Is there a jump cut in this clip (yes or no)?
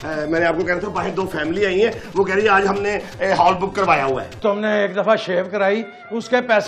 yes